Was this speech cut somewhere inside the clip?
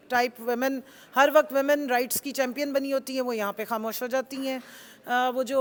no; 0 cuts

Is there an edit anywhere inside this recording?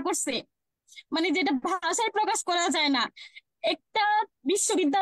no; 0 cuts

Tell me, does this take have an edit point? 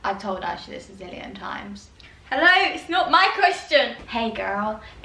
yes; 1 cut; at 3.9 s

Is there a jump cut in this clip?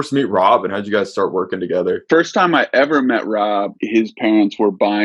yes; 2 cuts; at 2.0 s, 3.8 s

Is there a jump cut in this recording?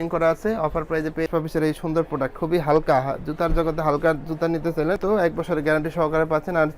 yes; 2 cuts; at 1.3 s, 5.0 s

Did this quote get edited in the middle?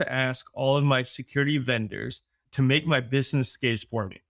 yes; 1 cut; at 2.4 s

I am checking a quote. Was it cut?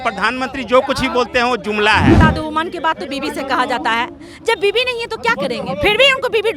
yes; 1 cut; at 2.2 s

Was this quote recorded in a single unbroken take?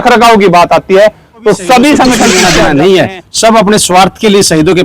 no; 1 cut; at 2.4 s

